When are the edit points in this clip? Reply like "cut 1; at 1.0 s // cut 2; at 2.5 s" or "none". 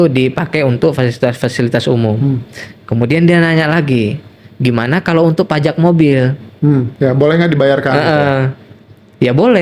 cut 1; at 6.9 s